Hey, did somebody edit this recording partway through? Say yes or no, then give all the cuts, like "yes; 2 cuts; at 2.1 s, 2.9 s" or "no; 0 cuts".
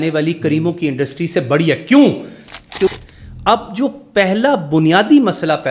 yes; 1 cut; at 2.9 s